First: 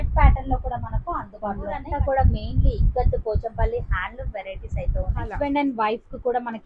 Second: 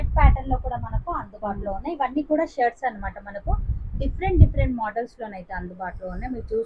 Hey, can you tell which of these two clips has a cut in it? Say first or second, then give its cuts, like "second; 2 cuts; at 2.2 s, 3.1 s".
first; 2 cuts; at 1.9 s, 5.3 s